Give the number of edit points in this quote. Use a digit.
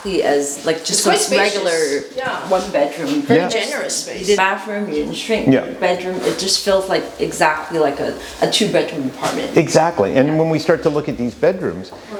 0